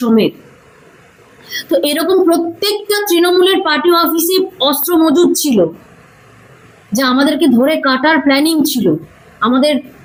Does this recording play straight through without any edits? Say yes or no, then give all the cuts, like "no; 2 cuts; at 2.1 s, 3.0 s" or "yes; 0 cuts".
yes; 0 cuts